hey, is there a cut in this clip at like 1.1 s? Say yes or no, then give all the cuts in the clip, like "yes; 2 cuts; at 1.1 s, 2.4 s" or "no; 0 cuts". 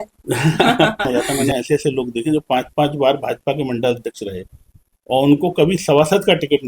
yes; 1 cut; at 1.1 s